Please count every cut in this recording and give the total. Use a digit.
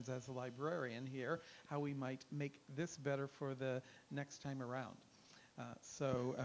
1